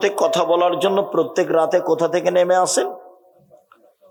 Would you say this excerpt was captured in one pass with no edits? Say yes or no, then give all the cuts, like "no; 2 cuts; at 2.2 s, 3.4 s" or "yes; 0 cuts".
yes; 0 cuts